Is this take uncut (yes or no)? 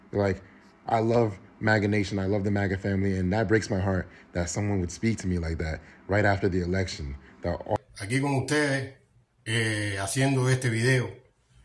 no